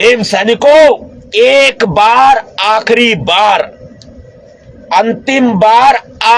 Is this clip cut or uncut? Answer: cut